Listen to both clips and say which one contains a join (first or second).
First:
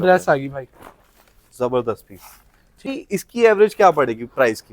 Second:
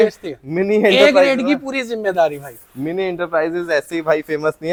first